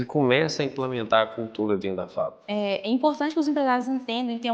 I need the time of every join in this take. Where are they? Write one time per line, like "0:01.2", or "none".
0:02.3